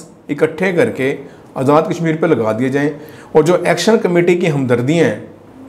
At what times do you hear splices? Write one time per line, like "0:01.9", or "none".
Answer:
none